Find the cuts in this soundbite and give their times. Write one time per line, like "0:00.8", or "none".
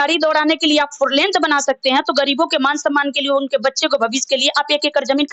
none